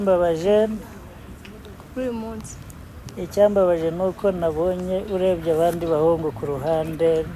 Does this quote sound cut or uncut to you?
uncut